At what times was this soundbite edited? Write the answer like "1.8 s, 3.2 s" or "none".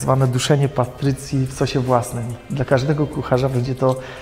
none